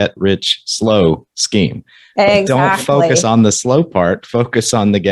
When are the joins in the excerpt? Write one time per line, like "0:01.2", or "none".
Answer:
none